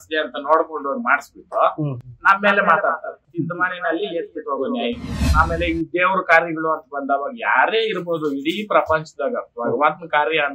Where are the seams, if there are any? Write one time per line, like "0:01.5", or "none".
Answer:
0:03.2
0:05.1